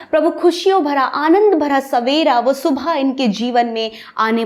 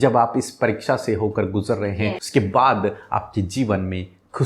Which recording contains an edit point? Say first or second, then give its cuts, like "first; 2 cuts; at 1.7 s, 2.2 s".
second; 1 cut; at 2.2 s